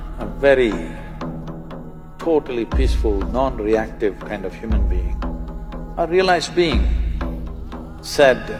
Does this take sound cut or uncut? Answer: uncut